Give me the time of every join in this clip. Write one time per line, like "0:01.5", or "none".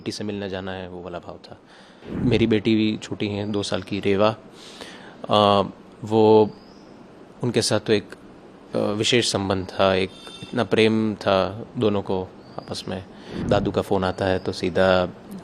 0:02.1
0:13.4